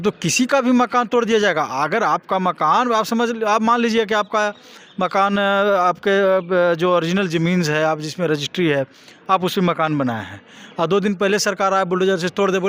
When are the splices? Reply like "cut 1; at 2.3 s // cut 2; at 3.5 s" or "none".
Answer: none